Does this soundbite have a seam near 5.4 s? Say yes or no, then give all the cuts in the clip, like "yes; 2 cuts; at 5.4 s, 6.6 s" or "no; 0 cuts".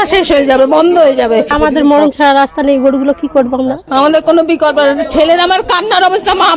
no; 2 cuts; at 1.5 s, 3.8 s